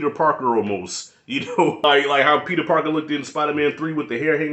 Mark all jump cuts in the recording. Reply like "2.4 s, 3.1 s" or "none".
1.8 s